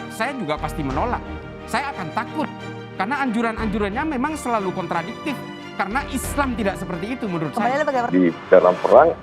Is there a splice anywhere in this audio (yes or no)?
yes